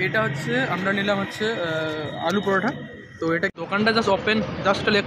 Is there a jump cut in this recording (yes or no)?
yes